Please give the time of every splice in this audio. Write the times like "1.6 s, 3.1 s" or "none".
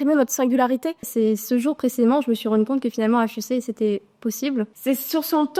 1.1 s, 4.7 s